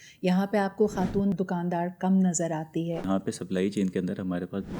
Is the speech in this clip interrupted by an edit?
yes; 2 cuts; at 1.3 s, 3.0 s

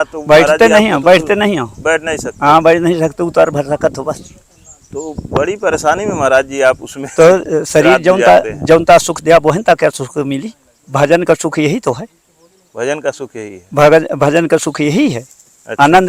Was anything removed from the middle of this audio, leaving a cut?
no; 0 cuts

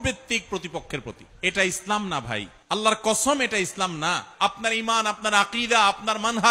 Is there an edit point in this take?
yes; 3 cuts; at 1.3 s, 2.5 s, 4.3 s

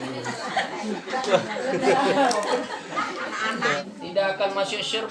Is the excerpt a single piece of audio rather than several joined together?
no; 1 cut; at 3.8 s

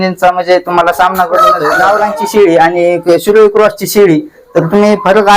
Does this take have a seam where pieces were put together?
yes; 1 cut; at 1.7 s

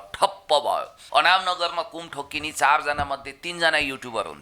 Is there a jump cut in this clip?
yes; 1 cut; at 1.0 s

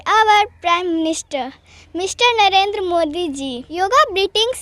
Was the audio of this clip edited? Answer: yes; 1 cut; at 3.6 s

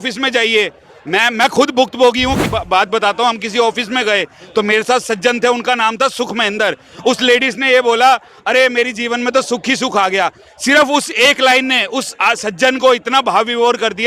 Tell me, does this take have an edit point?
yes; 1 cut; at 2.5 s

